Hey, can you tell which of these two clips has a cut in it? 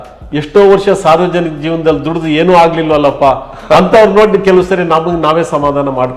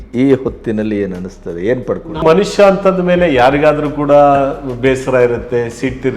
second; 1 cut; at 2.2 s

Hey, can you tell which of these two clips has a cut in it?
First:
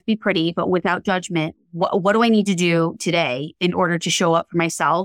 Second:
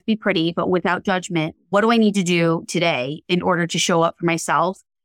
second; 1 cut; at 1.7 s

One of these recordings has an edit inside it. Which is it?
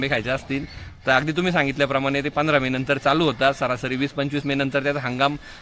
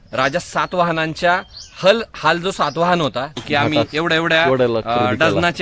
second; 1 cut; at 3.3 s

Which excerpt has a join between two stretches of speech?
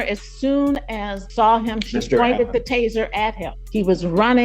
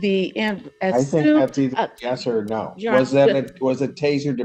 first; 2 cuts; at 1.2 s, 3.6 s

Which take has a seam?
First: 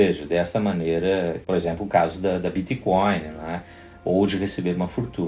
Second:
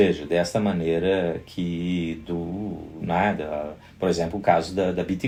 first; 1 cut; at 1.4 s

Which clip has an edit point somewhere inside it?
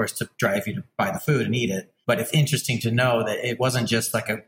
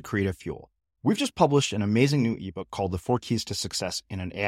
first; 3 cuts; at 0.8 s, 1.9 s, 3.6 s

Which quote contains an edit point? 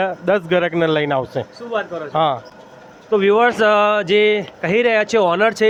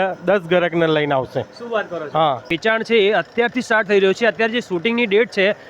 second; 1 cut; at 2.5 s

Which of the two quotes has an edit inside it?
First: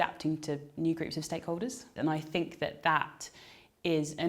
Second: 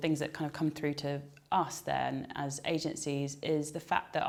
first; 1 cut; at 1.9 s

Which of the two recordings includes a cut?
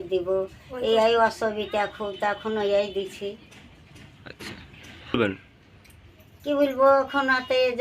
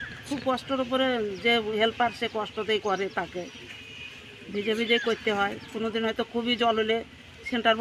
first; 1 cut; at 5.0 s

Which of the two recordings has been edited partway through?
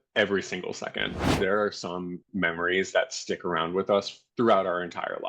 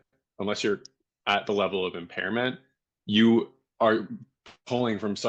first; 1 cut; at 1.3 s

